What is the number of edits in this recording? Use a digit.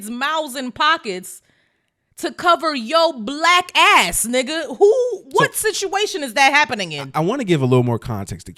0